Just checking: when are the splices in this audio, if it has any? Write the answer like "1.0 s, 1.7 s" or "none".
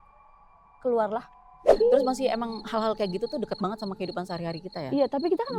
1.6 s